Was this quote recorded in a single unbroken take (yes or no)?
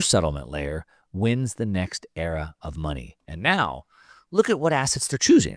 yes